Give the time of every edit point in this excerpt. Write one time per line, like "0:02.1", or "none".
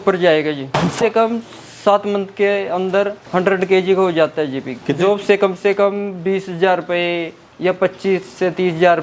0:00.9
0:04.9